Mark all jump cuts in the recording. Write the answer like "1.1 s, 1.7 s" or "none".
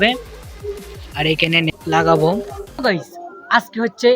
1.7 s, 2.8 s